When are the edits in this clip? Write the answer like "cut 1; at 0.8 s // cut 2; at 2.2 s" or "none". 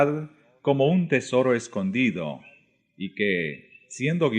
cut 1; at 1.9 s

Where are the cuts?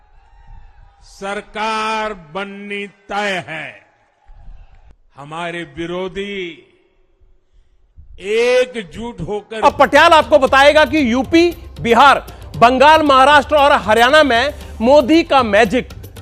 cut 1; at 9.5 s

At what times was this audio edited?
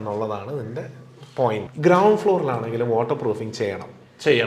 cut 1; at 1.6 s

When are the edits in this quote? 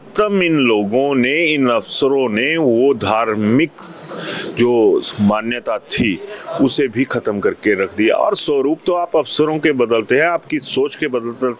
none

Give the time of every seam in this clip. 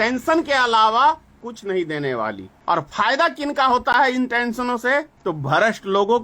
cut 1; at 1.5 s // cut 2; at 2.5 s // cut 3; at 5.1 s

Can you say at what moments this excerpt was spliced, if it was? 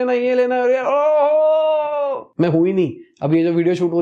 cut 1; at 2.2 s

